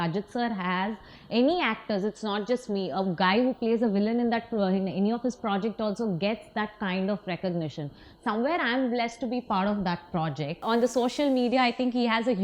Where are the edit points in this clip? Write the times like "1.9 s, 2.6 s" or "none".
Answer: 10.6 s